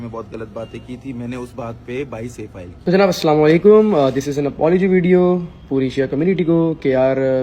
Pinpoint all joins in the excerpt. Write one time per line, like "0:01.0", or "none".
0:02.8